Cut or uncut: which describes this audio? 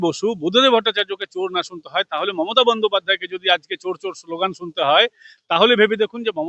uncut